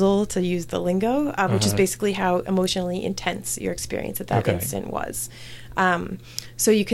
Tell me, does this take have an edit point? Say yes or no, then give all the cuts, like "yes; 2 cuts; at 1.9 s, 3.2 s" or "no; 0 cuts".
no; 0 cuts